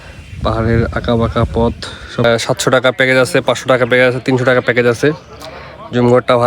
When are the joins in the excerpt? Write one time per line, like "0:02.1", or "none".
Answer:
0:02.2